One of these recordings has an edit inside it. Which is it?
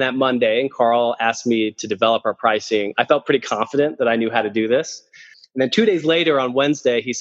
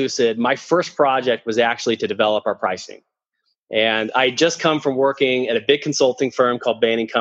first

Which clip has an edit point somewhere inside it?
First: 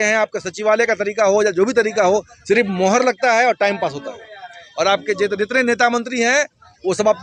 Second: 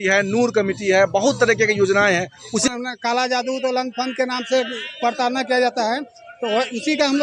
second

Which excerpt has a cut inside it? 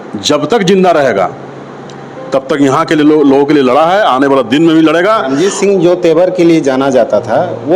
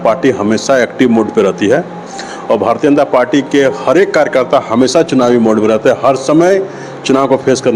first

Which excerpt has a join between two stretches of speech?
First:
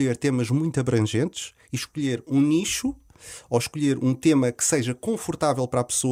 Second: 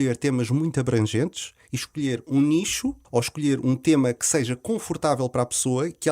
second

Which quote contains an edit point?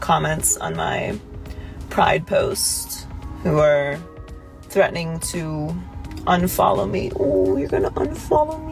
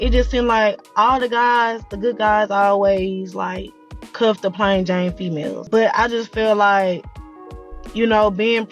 second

